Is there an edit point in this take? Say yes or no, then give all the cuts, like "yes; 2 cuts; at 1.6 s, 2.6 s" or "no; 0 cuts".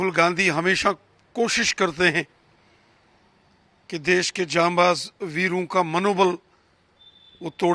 no; 0 cuts